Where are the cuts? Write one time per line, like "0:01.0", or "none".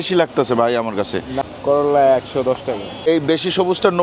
0:01.3
0:03.1